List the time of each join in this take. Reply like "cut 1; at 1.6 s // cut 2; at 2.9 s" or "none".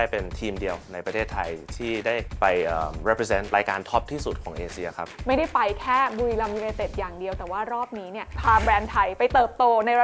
cut 1; at 2.3 s // cut 2; at 3.5 s // cut 3; at 5.1 s // cut 4; at 8.4 s